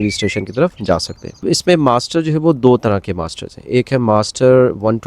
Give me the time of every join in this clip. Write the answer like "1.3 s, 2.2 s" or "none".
1.4 s